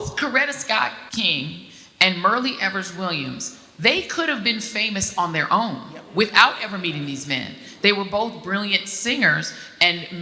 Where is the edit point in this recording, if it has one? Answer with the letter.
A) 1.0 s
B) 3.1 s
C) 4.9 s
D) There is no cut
A